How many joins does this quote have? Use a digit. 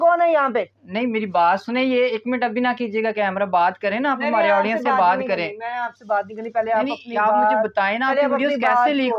0